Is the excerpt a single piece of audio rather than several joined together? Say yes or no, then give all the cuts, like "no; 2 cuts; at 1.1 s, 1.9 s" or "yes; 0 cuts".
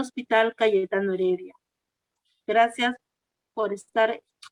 yes; 0 cuts